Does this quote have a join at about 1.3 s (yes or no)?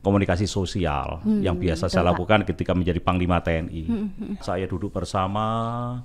no